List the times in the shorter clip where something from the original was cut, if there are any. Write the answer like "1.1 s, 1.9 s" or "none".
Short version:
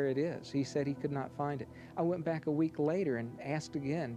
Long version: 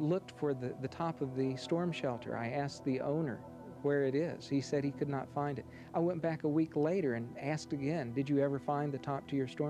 none